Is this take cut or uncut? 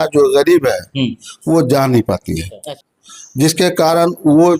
cut